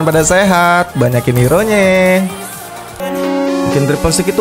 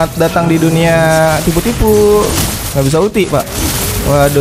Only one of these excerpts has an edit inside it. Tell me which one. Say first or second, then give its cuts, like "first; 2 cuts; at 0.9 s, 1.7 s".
first; 1 cut; at 3.0 s